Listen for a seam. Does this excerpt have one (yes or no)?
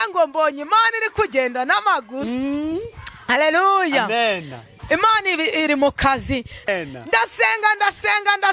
yes